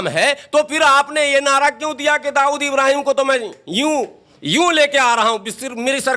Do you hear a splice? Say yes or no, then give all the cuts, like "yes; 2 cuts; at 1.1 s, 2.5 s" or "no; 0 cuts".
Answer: no; 0 cuts